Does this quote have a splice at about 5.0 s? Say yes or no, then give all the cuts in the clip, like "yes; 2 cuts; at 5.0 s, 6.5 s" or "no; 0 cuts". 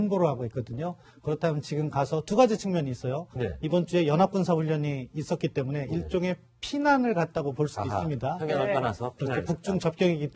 no; 1 cut; at 2.2 s